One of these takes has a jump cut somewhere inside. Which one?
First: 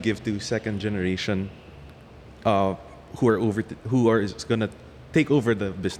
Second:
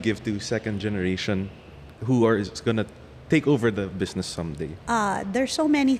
second; 2 cuts; at 1.9 s, 4.8 s

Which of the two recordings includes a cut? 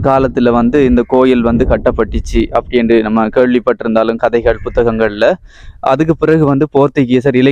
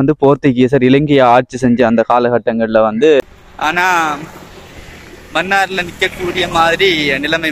second; 1 cut; at 3.2 s

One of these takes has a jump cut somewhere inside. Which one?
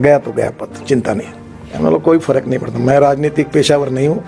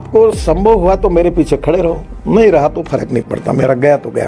first; 1 cut; at 1.6 s

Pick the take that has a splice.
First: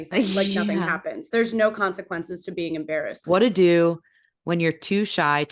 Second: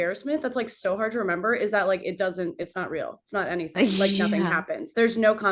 first; 1 cut; at 3.1 s

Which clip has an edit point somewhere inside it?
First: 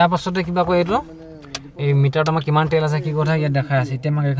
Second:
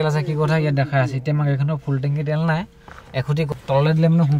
second; 1 cut; at 3.5 s

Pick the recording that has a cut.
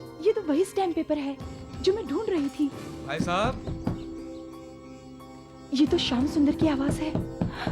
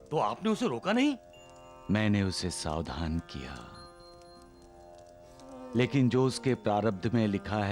first; 1 cut; at 2.9 s

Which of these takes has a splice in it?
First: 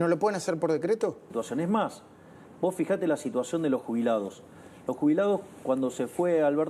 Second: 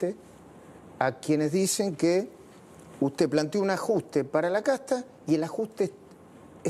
first; 1 cut; at 1.3 s

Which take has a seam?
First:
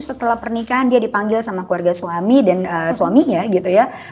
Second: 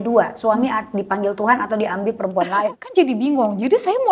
second; 1 cut; at 2.5 s

